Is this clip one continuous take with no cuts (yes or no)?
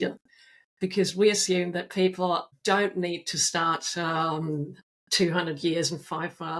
no